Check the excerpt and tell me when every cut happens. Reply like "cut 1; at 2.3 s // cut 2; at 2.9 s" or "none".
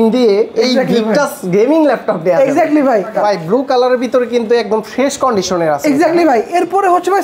cut 1; at 3.1 s